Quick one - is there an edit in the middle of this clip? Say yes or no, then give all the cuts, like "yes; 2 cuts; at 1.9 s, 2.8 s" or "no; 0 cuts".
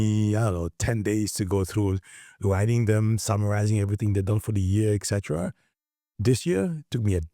no; 0 cuts